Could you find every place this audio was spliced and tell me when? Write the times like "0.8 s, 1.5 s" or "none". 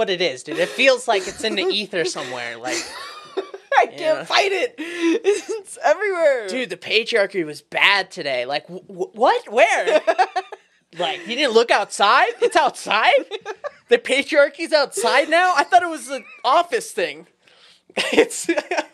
none